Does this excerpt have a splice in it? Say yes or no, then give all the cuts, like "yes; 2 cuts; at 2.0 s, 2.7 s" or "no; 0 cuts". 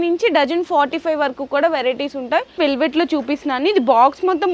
yes; 1 cut; at 2.6 s